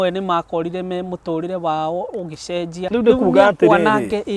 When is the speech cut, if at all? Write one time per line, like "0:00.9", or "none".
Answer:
0:02.8